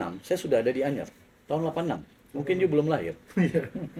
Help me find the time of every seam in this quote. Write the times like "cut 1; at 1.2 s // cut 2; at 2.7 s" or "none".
none